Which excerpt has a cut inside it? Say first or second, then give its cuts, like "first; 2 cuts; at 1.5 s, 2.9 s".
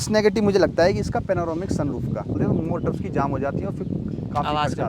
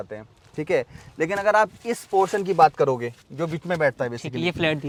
first; 1 cut; at 2.4 s